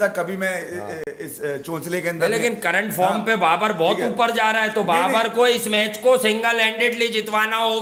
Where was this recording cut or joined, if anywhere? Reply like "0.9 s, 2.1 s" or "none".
none